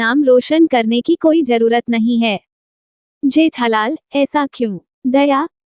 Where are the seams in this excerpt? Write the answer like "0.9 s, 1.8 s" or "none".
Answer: none